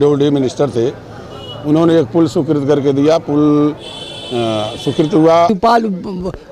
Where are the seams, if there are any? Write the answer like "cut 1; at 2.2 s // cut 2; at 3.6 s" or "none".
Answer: cut 1; at 5.5 s